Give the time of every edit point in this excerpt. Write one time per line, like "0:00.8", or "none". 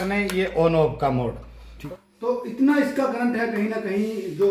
0:01.8